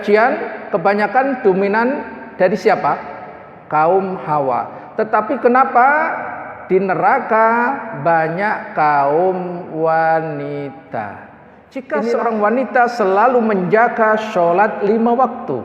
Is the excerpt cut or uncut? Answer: cut